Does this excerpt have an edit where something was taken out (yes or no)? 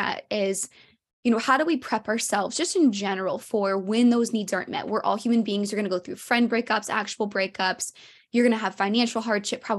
no